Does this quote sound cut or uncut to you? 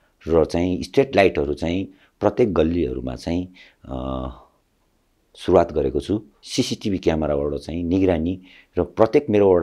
cut